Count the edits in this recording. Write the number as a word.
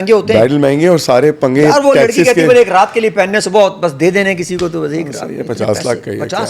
zero